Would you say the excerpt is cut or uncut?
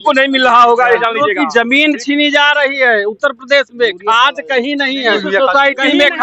cut